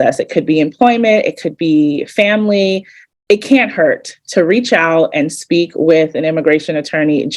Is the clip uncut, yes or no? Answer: yes